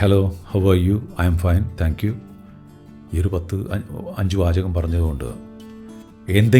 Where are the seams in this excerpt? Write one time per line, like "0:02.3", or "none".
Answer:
none